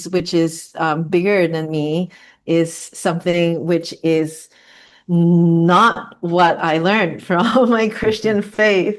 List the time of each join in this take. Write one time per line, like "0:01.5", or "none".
none